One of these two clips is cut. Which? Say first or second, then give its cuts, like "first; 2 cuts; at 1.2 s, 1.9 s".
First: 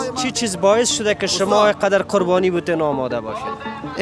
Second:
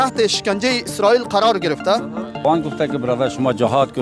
second; 1 cut; at 2.4 s